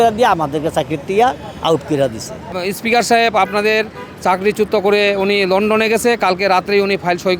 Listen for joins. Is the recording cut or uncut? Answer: cut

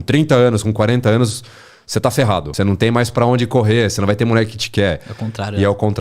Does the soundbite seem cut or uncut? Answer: cut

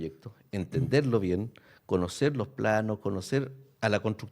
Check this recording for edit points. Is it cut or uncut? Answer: uncut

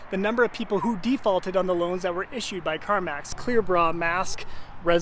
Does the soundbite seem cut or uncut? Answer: cut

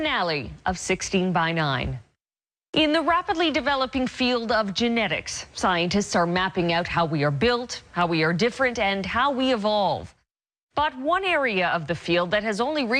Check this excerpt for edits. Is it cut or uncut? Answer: uncut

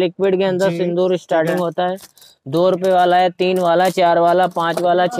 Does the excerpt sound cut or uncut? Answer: uncut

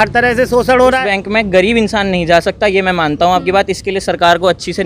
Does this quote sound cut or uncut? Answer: cut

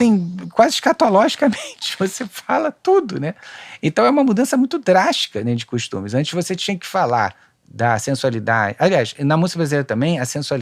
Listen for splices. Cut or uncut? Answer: uncut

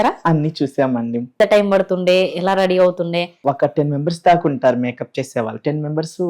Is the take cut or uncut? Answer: cut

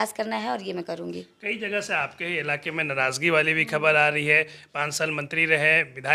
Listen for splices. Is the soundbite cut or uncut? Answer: uncut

